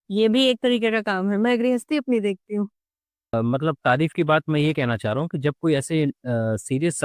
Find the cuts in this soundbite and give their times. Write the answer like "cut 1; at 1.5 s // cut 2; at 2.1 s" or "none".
cut 1; at 3.3 s